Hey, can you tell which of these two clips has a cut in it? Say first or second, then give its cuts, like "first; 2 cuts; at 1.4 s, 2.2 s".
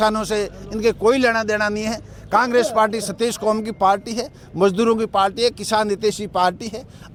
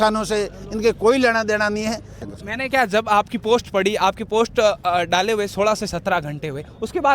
second; 1 cut; at 2.2 s